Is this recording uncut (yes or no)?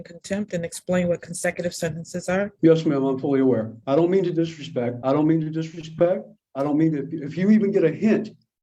no